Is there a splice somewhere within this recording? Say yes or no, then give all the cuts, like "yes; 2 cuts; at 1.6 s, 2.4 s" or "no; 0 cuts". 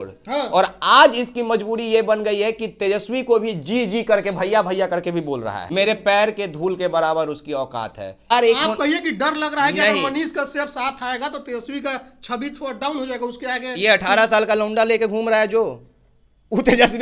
yes; 2 cuts; at 5.6 s, 8.3 s